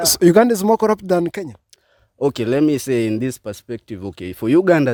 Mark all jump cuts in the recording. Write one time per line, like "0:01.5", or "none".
none